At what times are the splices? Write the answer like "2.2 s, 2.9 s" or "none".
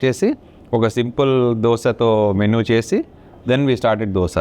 none